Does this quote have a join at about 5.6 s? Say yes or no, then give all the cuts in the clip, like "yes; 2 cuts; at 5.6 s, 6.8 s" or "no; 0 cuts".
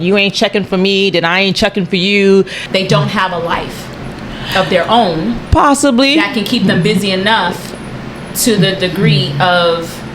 no; 1 cut; at 2.6 s